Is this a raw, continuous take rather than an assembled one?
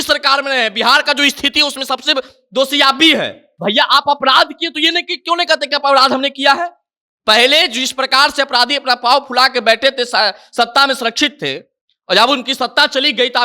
no; 1 cut; at 3.4 s

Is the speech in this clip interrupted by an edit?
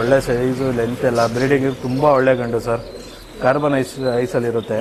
no; 0 cuts

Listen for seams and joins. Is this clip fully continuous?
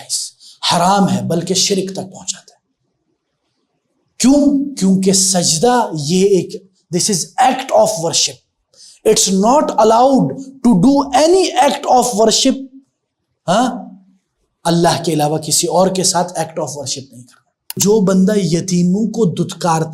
no; 1 cut; at 17.8 s

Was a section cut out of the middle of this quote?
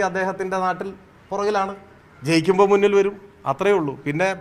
no; 0 cuts

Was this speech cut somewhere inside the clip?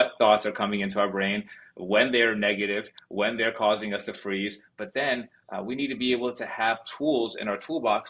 no; 0 cuts

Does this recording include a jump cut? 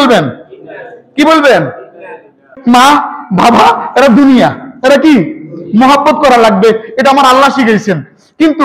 yes; 1 cut; at 2.5 s

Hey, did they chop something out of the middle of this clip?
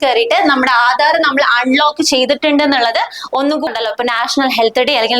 yes; 1 cut; at 3.7 s

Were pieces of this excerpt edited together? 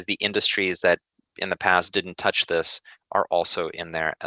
no; 0 cuts

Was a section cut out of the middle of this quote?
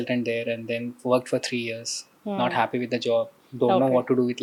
no; 0 cuts

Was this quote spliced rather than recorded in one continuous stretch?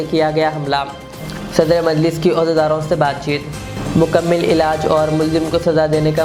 no; 0 cuts

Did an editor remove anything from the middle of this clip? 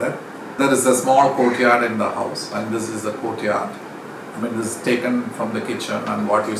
no; 0 cuts

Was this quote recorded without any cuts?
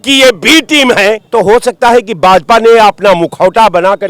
no; 1 cut; at 1.2 s

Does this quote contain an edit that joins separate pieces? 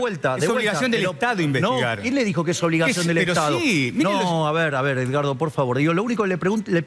no; 0 cuts

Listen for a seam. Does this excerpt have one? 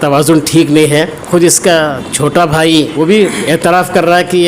yes; 2 cuts; at 1.2 s, 2.9 s

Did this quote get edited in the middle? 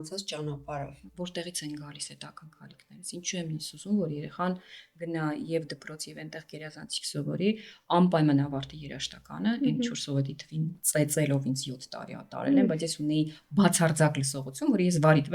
yes; 1 cut; at 1.0 s

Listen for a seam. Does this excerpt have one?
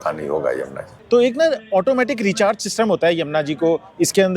yes; 1 cut; at 0.9 s

